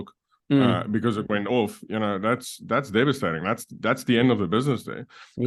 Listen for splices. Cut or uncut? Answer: uncut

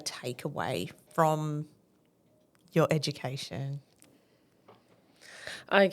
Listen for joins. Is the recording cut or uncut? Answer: cut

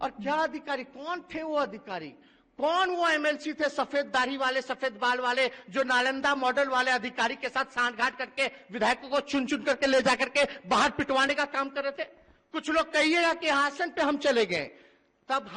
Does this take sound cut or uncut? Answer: uncut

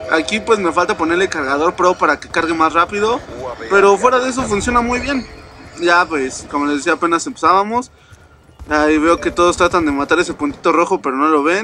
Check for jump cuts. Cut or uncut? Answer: uncut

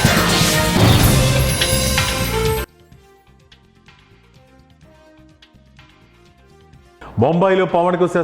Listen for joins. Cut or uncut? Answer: cut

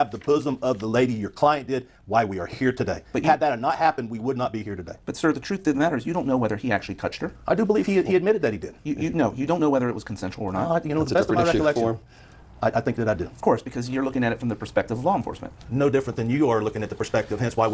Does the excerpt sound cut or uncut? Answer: uncut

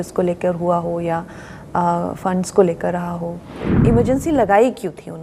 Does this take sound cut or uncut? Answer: cut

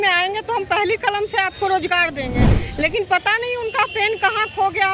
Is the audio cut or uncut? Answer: uncut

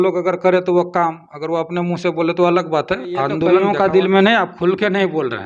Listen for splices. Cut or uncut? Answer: cut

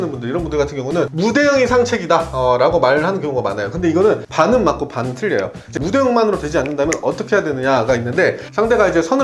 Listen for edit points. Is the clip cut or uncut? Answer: cut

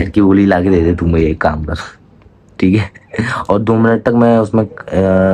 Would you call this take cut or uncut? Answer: uncut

